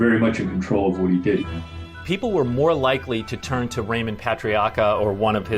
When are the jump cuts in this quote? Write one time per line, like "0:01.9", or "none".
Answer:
0:01.4